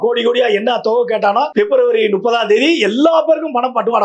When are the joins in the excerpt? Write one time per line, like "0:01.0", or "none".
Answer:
0:01.5